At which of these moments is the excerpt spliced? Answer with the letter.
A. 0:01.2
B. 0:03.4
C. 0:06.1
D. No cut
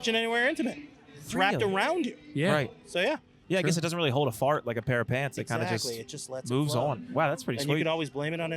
B